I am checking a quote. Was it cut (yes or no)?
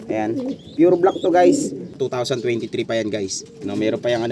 yes